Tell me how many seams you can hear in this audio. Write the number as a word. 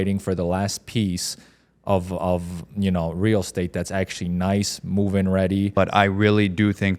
one